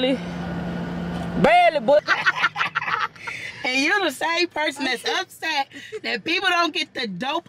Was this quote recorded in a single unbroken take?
no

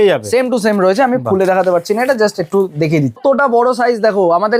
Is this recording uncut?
no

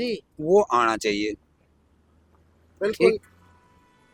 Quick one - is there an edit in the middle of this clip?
no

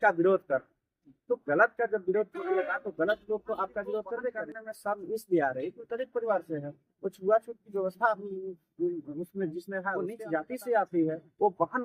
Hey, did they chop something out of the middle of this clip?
yes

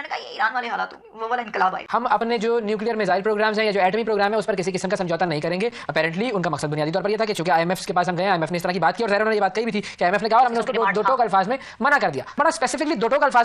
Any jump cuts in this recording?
no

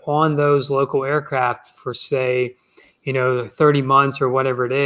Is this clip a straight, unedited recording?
yes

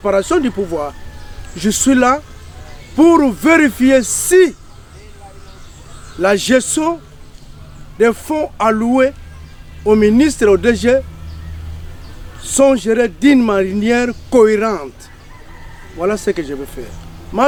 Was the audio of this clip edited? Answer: no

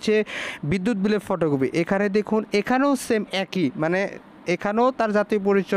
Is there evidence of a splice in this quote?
no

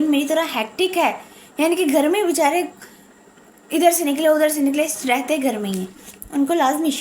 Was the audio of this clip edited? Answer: no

